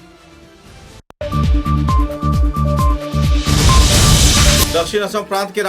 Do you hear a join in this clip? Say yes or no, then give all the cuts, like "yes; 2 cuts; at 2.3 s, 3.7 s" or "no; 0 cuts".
yes; 2 cuts; at 1.1 s, 4.7 s